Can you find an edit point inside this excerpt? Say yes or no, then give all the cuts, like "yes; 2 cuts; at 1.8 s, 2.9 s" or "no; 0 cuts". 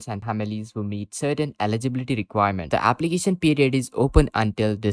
yes; 1 cut; at 2.6 s